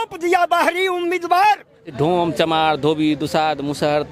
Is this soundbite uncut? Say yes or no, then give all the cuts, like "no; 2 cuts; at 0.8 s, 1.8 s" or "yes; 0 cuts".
no; 1 cut; at 1.9 s